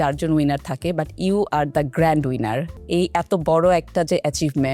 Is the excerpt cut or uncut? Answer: cut